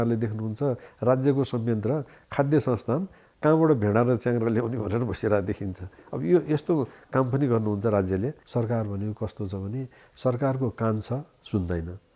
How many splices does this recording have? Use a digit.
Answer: 1